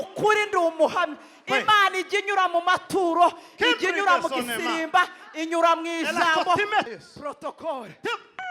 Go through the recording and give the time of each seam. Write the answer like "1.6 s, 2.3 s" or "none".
6.9 s